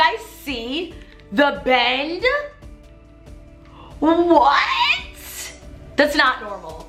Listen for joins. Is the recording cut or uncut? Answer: uncut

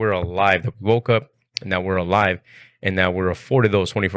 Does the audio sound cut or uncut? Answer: uncut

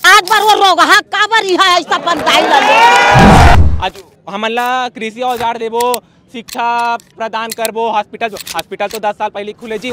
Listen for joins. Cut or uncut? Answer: cut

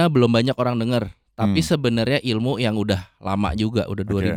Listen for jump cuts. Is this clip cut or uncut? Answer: uncut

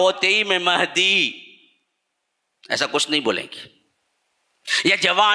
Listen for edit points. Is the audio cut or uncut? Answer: uncut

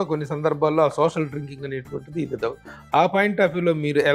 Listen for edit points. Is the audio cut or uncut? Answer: uncut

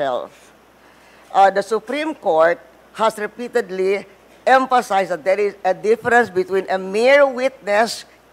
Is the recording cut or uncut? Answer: uncut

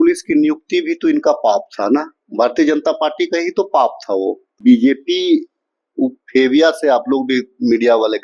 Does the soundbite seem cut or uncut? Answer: cut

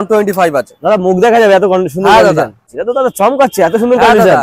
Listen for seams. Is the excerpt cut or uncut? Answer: cut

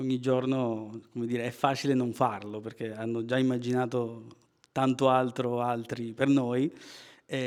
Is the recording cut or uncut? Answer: uncut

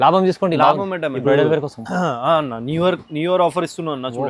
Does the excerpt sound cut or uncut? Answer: cut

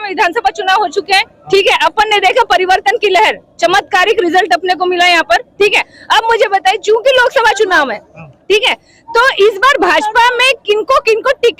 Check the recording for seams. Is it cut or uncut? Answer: uncut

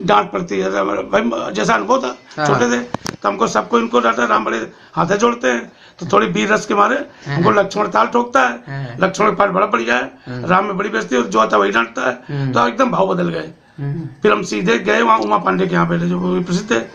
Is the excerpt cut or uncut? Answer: uncut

